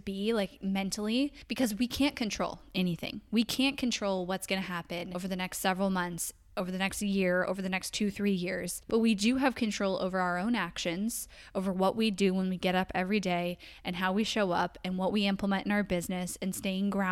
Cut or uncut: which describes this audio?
cut